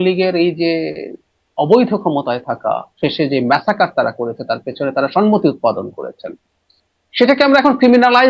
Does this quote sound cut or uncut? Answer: uncut